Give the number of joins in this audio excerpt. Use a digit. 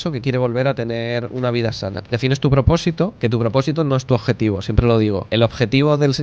3